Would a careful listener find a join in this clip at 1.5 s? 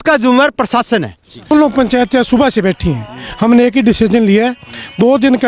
yes; 1 cut; at 1.5 s

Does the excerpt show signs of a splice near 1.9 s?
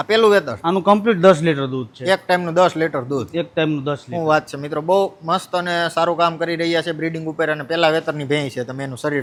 no; 0 cuts

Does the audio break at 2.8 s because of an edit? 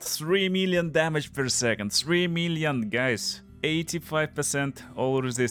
no; 0 cuts

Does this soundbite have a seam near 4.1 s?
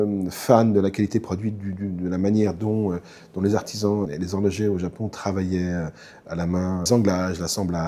yes; 2 cuts; at 4.1 s, 6.9 s

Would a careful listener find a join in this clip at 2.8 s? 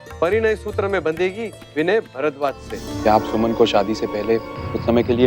yes; 1 cut; at 2.8 s

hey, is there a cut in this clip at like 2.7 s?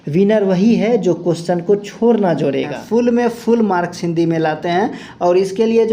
yes; 1 cut; at 2.7 s

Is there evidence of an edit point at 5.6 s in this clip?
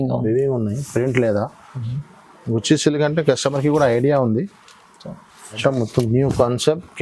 yes; 1 cut; at 5.6 s

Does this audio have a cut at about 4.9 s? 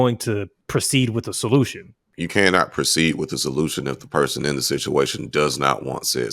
no; 1 cut; at 2.1 s

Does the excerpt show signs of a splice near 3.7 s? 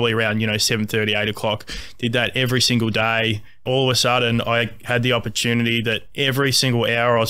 yes; 1 cut; at 3.7 s

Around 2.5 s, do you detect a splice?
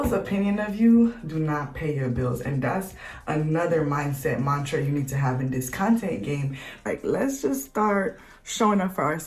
no; 1 cut; at 6.8 s

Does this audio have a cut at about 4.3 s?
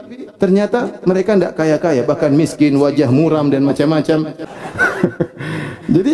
yes; 1 cut; at 4.3 s

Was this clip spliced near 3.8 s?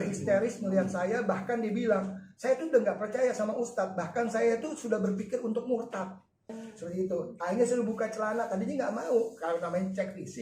no; 1 cut; at 6.6 s

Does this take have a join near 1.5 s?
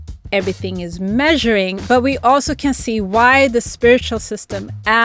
no; 0 cuts

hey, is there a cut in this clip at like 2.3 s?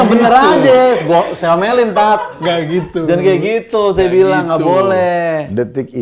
no; 0 cuts

